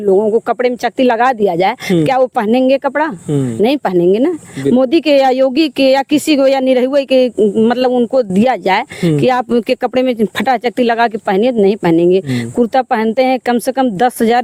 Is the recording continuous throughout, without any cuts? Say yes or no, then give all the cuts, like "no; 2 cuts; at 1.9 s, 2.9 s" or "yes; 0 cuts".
yes; 0 cuts